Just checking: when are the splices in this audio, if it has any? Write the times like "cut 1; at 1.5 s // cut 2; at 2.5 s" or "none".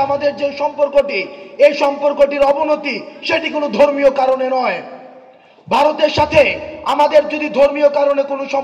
none